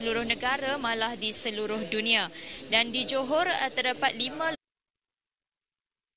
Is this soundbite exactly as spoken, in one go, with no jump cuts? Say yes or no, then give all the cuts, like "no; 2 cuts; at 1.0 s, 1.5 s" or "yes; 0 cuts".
yes; 0 cuts